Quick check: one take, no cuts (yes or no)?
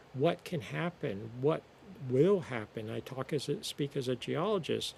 yes